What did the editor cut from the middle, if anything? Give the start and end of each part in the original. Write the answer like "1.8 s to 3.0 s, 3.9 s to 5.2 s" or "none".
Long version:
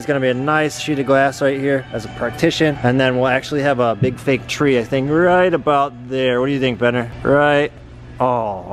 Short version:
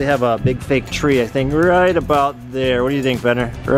none